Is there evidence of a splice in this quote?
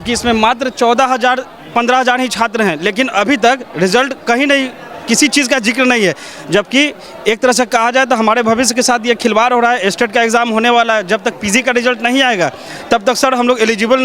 no; 0 cuts

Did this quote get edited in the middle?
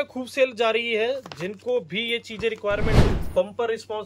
yes; 1 cut; at 3.0 s

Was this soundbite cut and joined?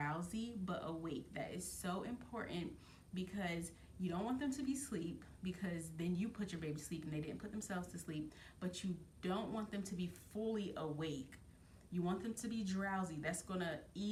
no; 0 cuts

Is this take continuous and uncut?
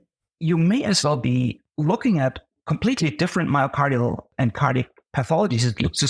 no; 3 cuts; at 1.7 s, 2.5 s, 4.3 s

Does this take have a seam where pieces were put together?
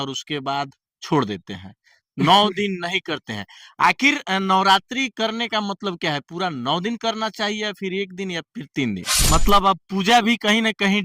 yes; 1 cut; at 9.1 s

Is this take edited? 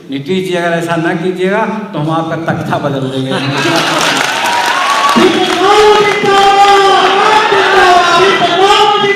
no; 0 cuts

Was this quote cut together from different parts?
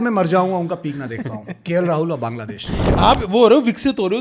yes; 1 cut; at 2.8 s

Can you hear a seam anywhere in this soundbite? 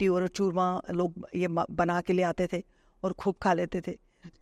no; 0 cuts

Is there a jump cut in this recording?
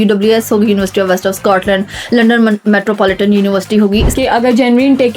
yes; 1 cut; at 4.1 s

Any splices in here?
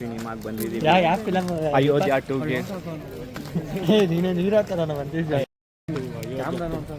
no; 0 cuts

